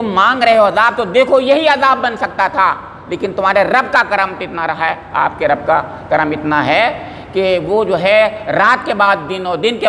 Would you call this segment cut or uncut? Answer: uncut